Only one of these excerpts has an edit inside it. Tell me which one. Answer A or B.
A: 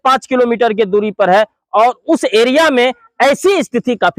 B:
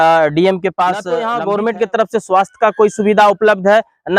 B